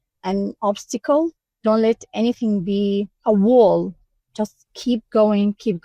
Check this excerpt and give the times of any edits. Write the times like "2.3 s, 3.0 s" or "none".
1.5 s